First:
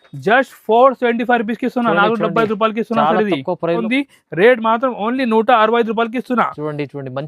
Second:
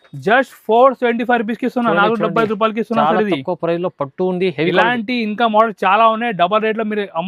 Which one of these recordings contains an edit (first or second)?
first